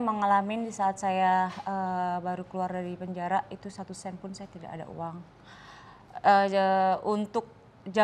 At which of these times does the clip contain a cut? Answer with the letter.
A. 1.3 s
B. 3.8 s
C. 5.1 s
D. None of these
D